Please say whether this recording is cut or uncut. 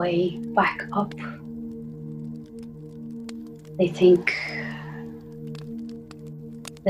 cut